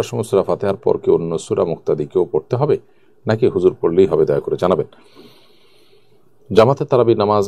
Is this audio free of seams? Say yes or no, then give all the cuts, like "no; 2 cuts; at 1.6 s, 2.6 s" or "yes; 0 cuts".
yes; 0 cuts